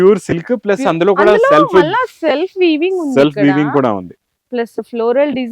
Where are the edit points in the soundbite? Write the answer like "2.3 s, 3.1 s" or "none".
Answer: none